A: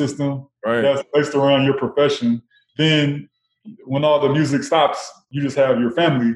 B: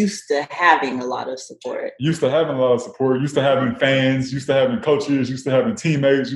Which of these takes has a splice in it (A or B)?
A